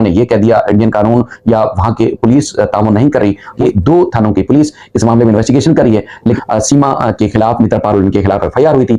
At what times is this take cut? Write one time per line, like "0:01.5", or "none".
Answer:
0:03.6
0:06.4